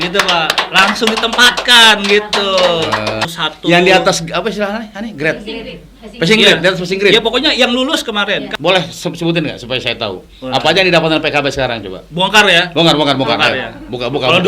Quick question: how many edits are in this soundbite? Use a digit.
2